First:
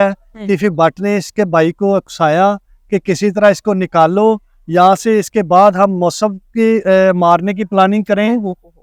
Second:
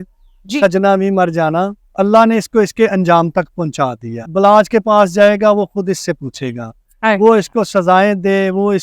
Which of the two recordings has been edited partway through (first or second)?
second